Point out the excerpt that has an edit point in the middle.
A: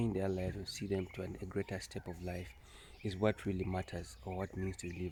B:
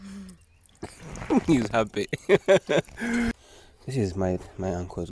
B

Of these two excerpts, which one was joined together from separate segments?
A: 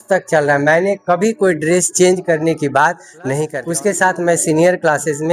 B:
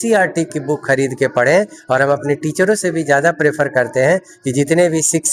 A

